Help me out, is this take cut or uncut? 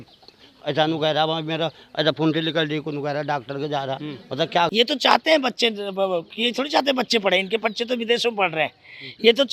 cut